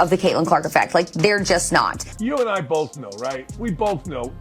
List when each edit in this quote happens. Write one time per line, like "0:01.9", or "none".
0:02.0